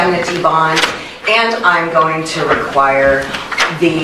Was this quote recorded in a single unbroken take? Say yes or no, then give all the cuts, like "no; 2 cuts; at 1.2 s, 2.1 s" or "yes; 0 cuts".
yes; 0 cuts